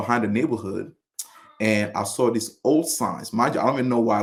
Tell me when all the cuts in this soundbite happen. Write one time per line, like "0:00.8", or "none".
none